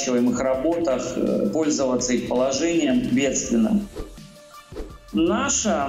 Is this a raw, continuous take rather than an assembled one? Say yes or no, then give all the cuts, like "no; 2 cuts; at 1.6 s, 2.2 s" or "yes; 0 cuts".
no; 1 cut; at 4.5 s